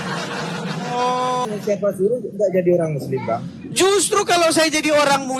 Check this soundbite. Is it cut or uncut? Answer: cut